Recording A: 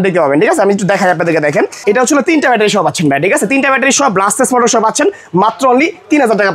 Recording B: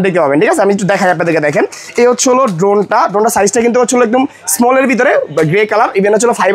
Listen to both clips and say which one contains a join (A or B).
A